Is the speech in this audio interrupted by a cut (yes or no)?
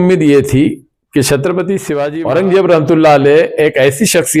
yes